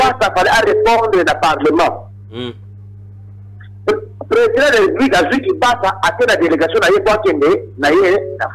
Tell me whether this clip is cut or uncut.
uncut